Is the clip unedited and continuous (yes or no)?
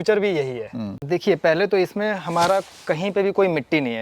no